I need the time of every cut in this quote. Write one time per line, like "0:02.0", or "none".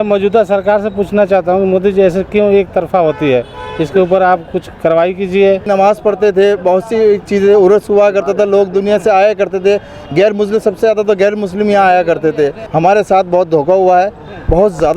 0:05.6
0:12.6